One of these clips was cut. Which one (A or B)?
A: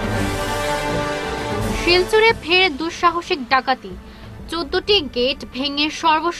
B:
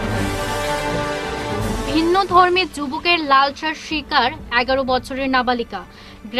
A